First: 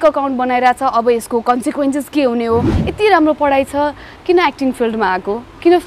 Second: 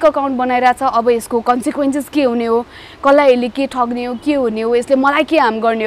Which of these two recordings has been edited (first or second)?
first